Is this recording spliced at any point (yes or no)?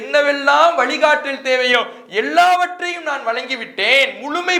no